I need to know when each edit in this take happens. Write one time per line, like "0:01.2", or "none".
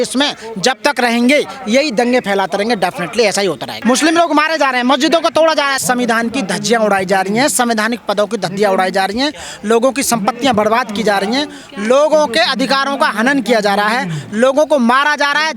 0:03.7
0:05.8

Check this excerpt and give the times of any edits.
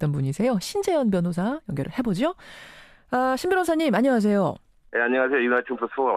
none

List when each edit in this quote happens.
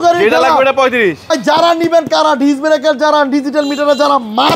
0:01.3

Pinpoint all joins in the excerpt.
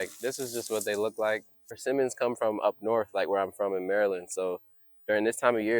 0:01.7

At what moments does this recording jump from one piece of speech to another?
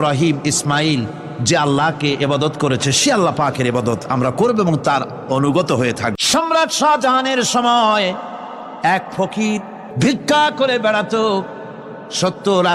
0:06.2
0:09.8

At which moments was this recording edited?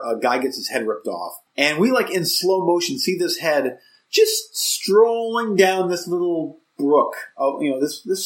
0:01.4

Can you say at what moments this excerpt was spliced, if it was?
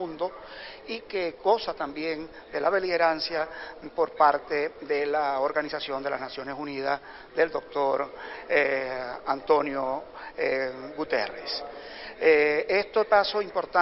none

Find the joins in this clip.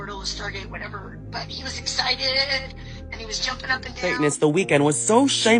0:04.1

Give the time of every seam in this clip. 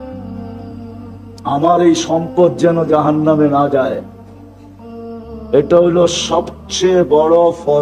0:01.3

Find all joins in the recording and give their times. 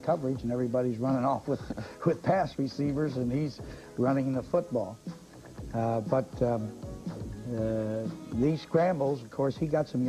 0:08.2

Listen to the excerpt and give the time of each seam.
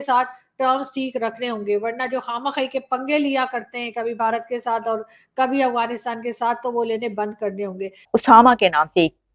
0:08.1

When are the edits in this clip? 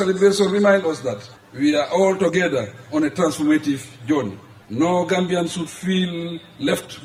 none

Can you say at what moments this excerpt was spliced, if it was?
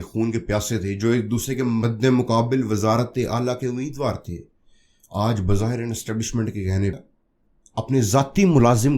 0:07.0

